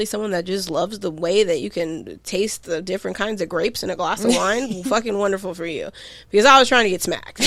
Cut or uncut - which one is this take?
uncut